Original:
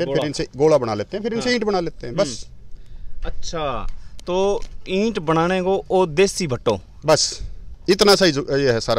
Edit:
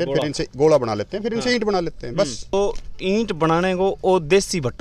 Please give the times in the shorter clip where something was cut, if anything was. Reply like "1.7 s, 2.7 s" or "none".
2.5 s

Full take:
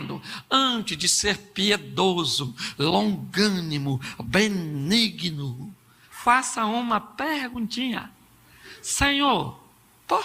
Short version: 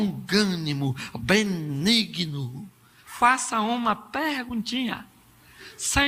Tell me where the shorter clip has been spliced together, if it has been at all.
none

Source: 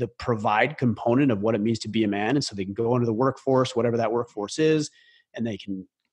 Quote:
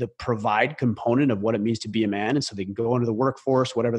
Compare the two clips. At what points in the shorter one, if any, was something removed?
none

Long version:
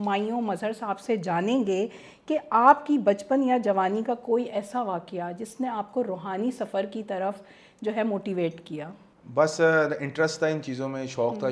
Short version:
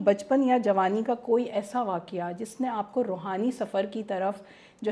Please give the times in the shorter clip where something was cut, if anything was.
none

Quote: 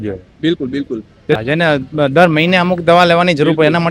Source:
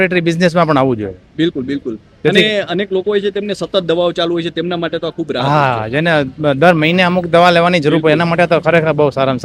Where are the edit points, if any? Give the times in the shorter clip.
1.4 s

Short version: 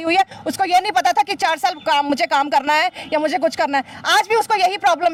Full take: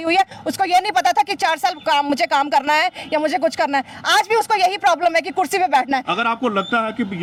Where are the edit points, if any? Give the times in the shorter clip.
none

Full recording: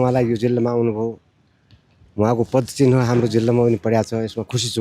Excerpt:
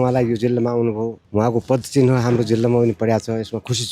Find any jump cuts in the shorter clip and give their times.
1.2 s

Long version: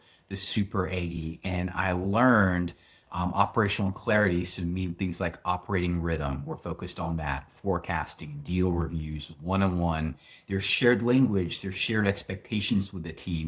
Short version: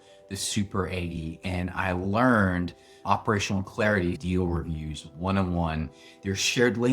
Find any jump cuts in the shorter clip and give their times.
3.0 s, 4.2 s

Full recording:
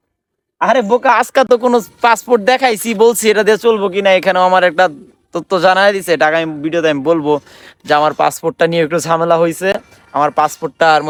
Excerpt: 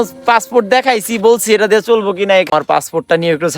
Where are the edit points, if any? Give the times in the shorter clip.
2.5 s

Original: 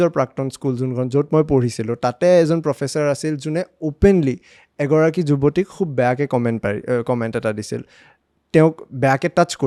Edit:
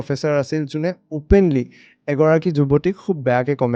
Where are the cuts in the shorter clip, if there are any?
none

